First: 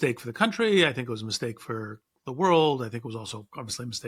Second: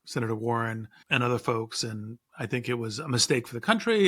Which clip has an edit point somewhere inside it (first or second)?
second